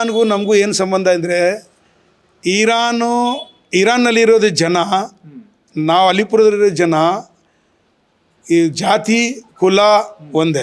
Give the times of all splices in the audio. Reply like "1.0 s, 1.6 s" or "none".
none

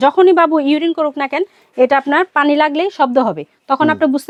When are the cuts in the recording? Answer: none

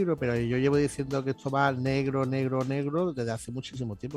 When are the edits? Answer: none

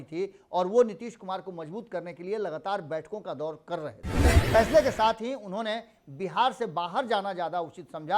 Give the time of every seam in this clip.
4.4 s

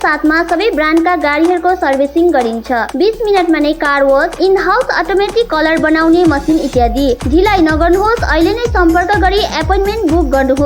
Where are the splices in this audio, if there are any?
none

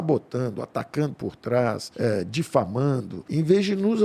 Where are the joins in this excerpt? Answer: 1.9 s, 3.2 s

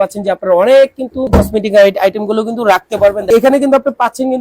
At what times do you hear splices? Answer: 1.3 s, 3.3 s

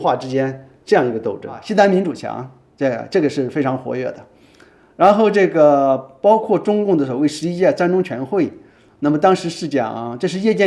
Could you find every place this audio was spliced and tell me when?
1.5 s

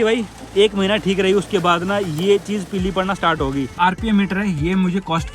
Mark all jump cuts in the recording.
3.7 s

